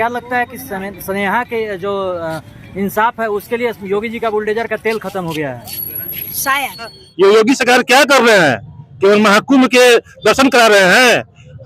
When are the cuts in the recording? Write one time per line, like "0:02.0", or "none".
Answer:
0:07.0